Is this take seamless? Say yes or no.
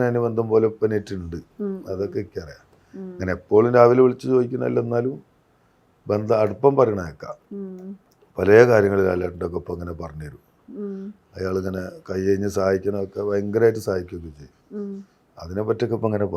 yes